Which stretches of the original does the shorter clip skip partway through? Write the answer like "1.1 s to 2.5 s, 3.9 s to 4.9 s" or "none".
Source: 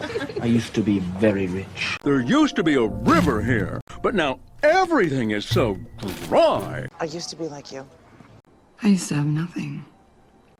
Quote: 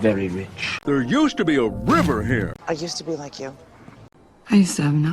3.8 s to 6.9 s